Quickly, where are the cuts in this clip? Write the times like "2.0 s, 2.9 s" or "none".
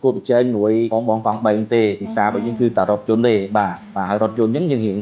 0.9 s, 3.9 s